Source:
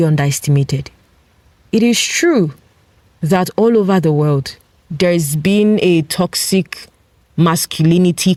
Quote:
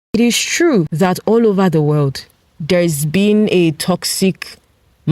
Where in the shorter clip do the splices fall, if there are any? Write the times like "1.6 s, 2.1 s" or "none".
0.9 s